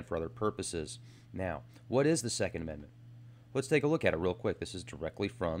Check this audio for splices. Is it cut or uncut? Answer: cut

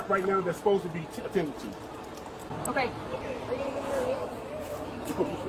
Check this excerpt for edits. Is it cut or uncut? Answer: cut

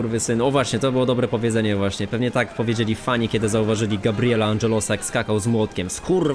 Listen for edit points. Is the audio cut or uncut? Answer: uncut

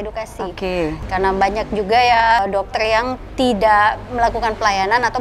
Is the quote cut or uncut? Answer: cut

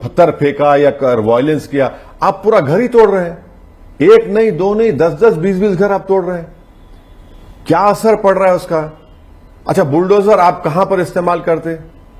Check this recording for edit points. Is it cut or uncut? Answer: uncut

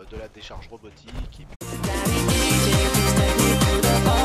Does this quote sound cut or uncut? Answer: uncut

